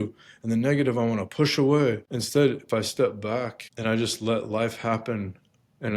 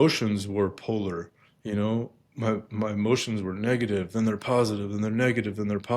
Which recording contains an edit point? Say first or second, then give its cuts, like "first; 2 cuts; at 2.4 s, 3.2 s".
first; 2 cuts; at 2.1 s, 3.6 s